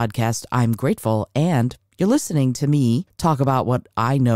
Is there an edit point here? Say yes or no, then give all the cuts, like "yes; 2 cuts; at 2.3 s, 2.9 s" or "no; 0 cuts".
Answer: yes; 1 cut; at 3.1 s